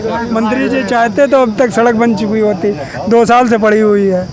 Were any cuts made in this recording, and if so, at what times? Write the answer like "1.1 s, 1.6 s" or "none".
none